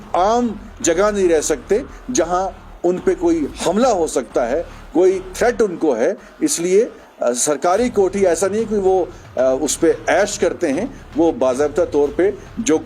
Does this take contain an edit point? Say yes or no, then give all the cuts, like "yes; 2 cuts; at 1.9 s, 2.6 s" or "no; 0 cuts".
no; 0 cuts